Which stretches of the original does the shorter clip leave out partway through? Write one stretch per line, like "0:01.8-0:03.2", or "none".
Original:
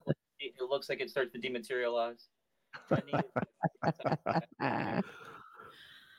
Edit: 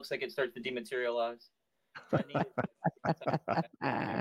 none